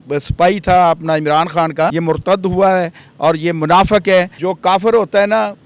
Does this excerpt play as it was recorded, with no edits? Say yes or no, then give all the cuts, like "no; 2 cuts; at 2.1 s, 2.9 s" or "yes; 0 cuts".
no; 2 cuts; at 1.9 s, 4.3 s